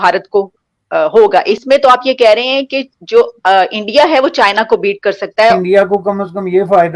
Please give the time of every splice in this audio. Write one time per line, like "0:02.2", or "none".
0:01.6
0:05.6